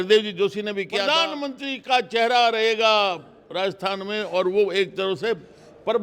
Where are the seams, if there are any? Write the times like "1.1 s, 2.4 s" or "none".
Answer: 1.1 s